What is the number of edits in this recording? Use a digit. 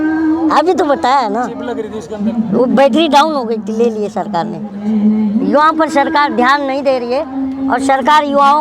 1